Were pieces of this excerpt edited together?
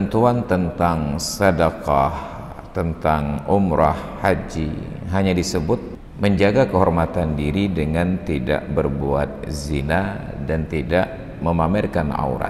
yes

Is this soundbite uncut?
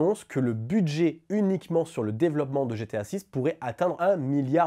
yes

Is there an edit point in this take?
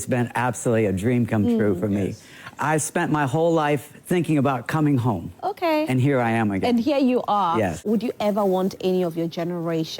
yes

